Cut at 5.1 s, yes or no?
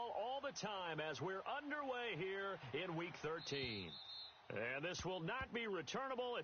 no